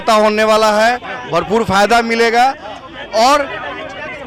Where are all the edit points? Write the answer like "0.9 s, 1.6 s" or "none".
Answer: none